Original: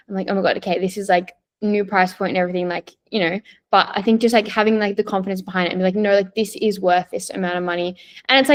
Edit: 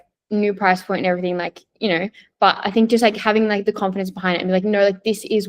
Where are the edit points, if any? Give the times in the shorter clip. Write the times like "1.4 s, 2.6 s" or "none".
none